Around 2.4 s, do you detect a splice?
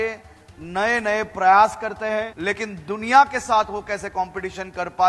yes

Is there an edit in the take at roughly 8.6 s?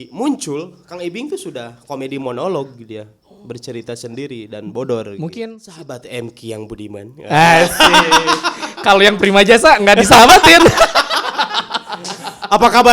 no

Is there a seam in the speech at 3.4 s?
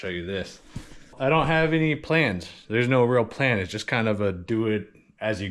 no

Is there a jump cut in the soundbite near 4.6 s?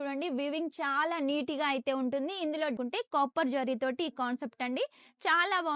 no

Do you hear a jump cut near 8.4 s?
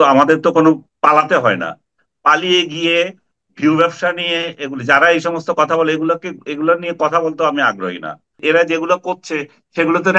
yes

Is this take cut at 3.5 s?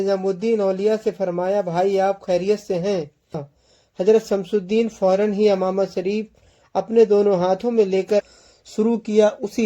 yes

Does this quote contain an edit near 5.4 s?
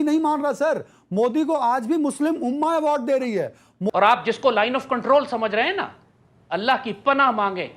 no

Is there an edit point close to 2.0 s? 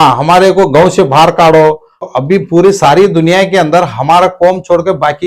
yes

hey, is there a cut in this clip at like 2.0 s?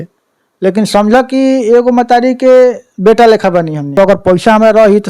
no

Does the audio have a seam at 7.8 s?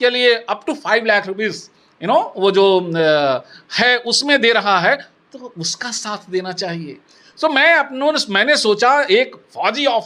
no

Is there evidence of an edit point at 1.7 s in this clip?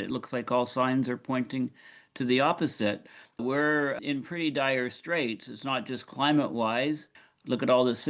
no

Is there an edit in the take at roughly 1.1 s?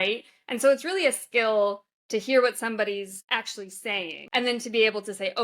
no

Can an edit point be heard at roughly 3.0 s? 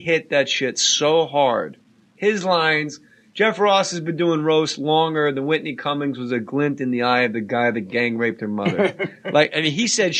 no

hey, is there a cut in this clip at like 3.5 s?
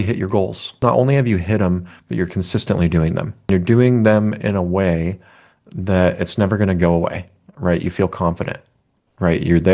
yes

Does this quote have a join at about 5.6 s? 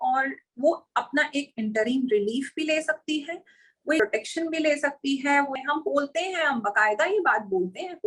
yes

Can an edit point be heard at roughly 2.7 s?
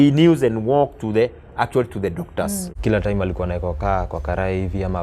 yes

